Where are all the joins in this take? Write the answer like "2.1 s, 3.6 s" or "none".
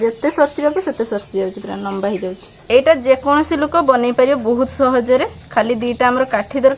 2.5 s